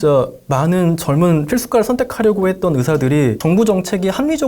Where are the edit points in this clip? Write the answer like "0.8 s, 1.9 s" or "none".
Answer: 3.4 s